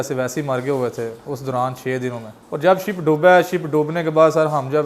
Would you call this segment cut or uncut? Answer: uncut